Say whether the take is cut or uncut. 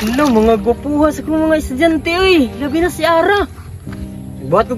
uncut